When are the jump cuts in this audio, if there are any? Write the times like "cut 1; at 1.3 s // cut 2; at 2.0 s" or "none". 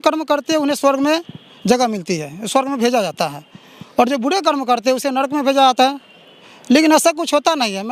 none